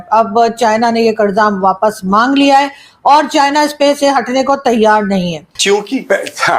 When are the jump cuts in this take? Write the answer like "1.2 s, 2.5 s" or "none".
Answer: 5.4 s